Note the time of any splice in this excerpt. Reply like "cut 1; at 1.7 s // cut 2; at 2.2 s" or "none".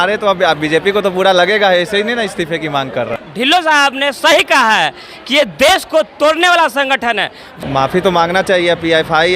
cut 1; at 3.1 s // cut 2; at 7.5 s